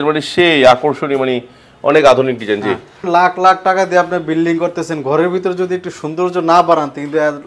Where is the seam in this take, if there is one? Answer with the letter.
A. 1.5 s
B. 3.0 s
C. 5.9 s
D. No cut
B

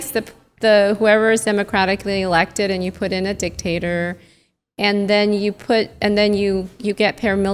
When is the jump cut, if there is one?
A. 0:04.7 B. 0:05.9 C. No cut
C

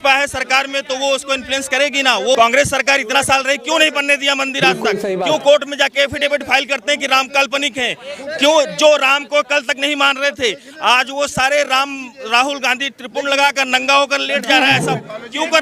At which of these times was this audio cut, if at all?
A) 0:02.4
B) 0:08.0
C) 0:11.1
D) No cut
A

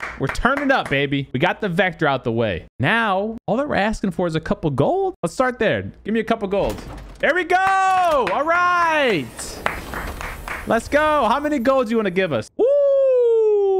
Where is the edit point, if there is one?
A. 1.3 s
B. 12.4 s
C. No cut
A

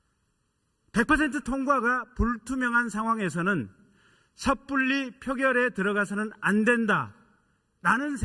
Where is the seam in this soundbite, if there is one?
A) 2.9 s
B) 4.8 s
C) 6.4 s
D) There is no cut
A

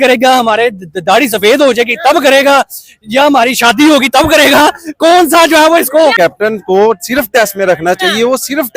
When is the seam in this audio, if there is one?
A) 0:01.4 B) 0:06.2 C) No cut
B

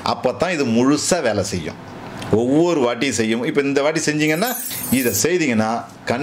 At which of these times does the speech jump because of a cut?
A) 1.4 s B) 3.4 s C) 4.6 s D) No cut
C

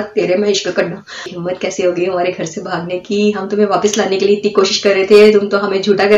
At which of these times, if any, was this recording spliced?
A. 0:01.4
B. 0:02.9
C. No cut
A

